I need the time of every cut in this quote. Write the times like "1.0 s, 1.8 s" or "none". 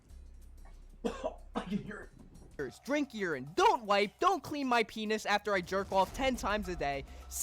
2.6 s